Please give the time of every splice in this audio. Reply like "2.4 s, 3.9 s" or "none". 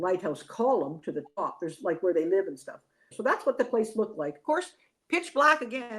3.0 s